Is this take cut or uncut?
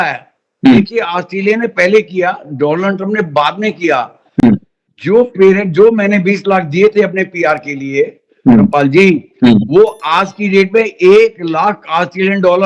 uncut